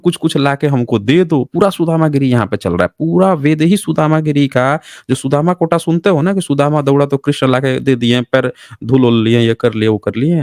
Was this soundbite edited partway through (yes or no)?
no